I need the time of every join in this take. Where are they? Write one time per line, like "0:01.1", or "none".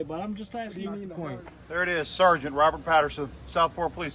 0:01.1